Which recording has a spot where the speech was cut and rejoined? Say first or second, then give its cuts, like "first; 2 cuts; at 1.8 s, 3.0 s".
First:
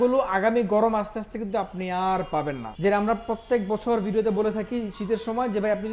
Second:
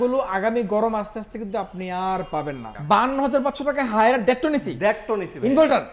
second; 1 cut; at 2.7 s